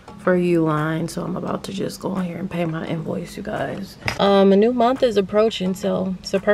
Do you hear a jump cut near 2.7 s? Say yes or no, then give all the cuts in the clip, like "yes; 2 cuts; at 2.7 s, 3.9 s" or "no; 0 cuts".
no; 1 cut; at 4.0 s